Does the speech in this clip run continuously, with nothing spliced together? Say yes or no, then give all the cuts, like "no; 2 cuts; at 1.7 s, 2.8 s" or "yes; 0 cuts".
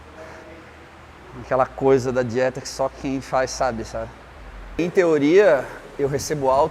no; 1 cut; at 4.9 s